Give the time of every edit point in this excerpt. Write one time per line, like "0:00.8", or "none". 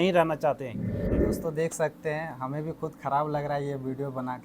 0:01.1